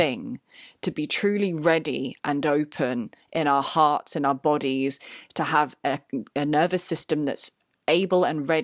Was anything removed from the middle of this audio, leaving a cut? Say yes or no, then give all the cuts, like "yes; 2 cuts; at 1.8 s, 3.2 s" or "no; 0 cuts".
no; 0 cuts